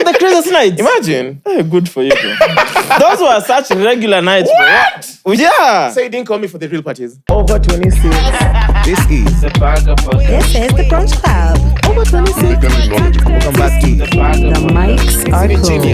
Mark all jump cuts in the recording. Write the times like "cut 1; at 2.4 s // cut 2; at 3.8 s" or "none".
cut 1; at 7.1 s